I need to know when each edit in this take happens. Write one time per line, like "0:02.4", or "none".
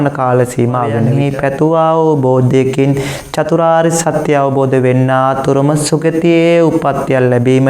0:01.1